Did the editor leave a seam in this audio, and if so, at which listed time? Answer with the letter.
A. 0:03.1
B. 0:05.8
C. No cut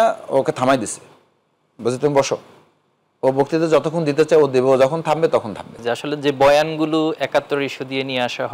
B